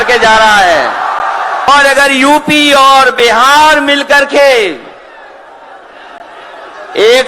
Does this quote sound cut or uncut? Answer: cut